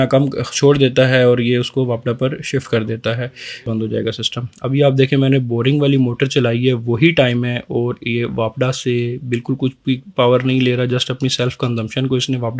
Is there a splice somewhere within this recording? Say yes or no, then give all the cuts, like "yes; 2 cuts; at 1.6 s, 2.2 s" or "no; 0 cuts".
yes; 1 cut; at 3.7 s